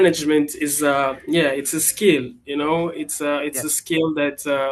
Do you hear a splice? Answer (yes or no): no